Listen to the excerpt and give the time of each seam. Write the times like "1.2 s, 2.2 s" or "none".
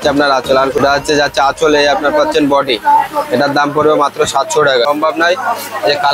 0.8 s, 4.9 s